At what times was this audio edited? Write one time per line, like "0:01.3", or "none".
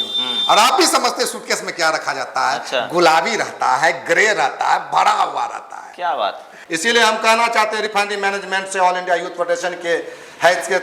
0:06.5